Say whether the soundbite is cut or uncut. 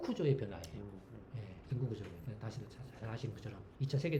uncut